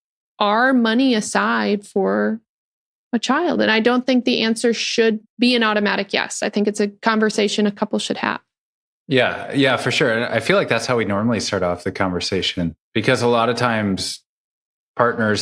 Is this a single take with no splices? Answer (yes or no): no